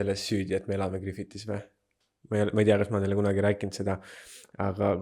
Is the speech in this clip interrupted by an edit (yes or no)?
no